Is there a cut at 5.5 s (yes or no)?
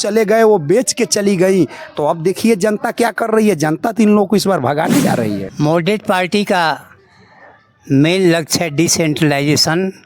yes